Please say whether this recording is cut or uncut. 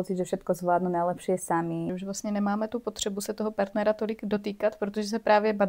cut